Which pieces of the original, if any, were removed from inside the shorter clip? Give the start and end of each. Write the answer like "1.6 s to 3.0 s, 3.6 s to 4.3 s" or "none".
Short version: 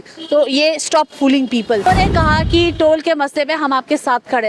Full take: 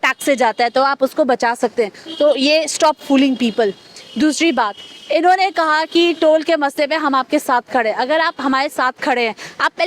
3.7 s to 5.3 s